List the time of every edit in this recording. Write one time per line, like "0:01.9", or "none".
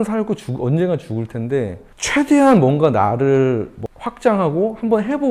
none